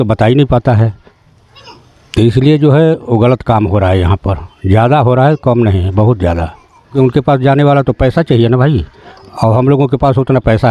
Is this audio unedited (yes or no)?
no